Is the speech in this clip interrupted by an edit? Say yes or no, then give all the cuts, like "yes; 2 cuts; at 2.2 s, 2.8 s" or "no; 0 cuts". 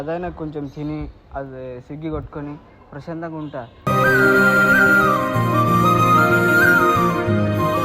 no; 0 cuts